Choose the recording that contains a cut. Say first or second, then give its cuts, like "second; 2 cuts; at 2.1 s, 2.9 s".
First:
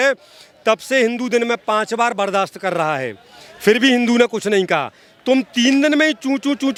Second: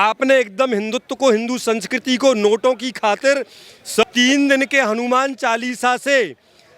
second; 1 cut; at 4.0 s